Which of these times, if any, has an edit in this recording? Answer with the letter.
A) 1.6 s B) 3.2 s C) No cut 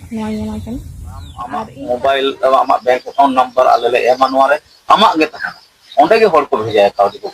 A